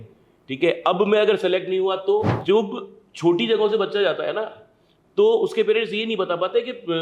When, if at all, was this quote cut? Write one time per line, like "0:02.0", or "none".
0:02.3

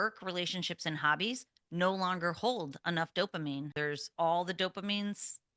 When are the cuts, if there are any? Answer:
0:03.7

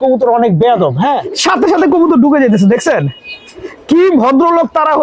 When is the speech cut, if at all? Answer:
0:01.2

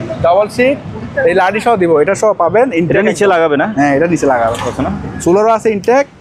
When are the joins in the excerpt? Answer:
0:04.7

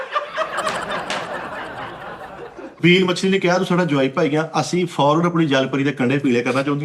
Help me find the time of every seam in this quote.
0:02.7

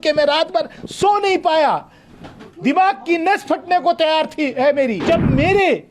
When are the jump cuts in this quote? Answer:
0:05.0

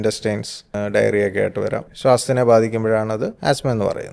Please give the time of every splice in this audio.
0:00.7
0:01.9
0:03.4

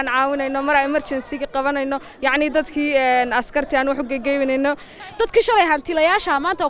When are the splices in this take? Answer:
0:04.9

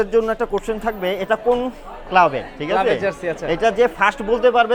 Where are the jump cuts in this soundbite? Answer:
none

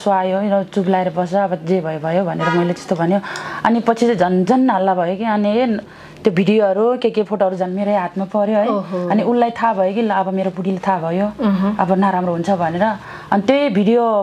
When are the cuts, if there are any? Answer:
none

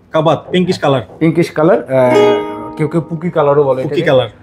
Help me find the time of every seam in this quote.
none

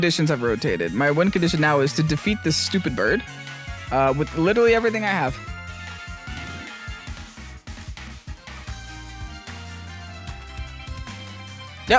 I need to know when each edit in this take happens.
none

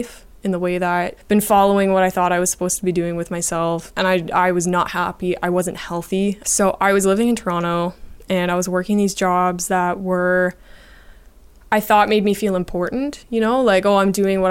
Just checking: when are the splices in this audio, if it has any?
0:01.2
0:03.9
0:06.4

